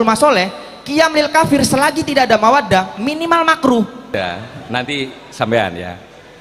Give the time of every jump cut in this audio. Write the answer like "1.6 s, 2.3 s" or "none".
4.1 s